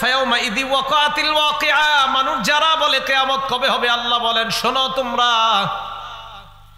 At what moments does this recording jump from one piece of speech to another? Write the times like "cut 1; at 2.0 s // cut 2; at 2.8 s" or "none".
none